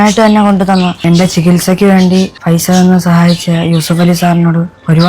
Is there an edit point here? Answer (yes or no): yes